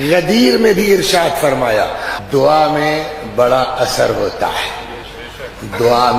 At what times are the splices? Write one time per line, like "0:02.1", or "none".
0:02.1